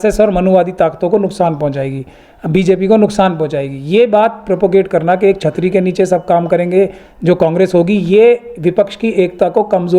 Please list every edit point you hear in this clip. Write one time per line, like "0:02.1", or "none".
none

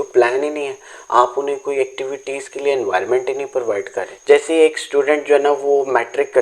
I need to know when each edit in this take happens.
0:04.1

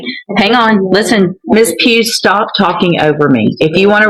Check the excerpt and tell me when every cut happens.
0:01.5

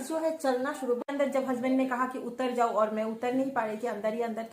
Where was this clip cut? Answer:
0:01.0

